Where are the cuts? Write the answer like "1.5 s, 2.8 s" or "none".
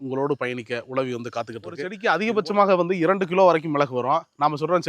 1.9 s